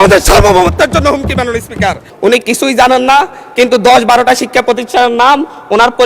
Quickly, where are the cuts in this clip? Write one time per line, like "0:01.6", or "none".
0:02.1